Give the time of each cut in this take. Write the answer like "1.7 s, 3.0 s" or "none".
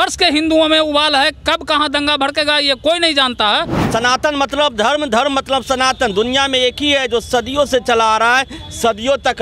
3.8 s